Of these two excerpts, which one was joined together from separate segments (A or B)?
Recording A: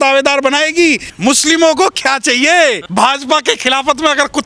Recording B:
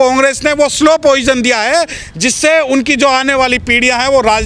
A